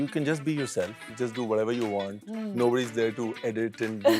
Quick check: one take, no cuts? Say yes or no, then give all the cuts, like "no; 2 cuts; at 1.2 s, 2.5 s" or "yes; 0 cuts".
no; 1 cut; at 1.0 s